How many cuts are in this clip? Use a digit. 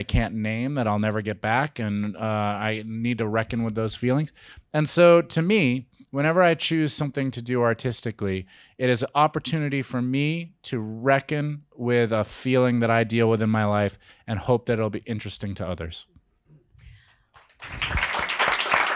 0